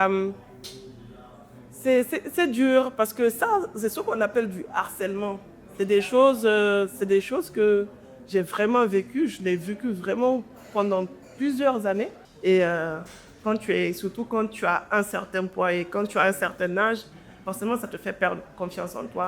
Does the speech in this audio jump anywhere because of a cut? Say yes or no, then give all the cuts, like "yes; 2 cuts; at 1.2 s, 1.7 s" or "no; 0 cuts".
yes; 1 cut; at 12.2 s